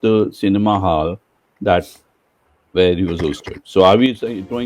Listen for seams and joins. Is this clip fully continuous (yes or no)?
yes